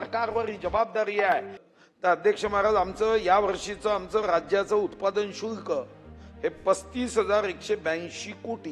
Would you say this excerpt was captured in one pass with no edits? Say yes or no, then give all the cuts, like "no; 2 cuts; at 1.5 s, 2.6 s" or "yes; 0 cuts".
no; 1 cut; at 1.6 s